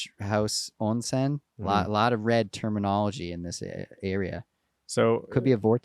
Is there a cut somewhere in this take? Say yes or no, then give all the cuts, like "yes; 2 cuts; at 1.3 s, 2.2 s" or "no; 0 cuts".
no; 0 cuts